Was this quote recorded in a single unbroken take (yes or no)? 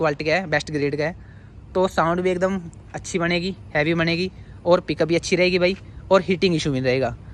yes